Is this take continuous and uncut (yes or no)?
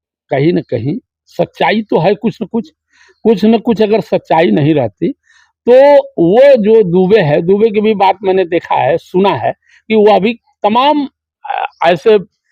yes